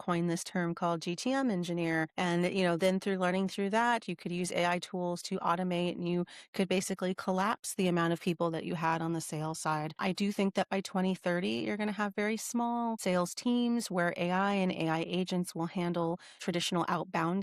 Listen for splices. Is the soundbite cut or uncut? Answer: cut